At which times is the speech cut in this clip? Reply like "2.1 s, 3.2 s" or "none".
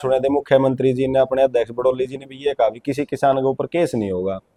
none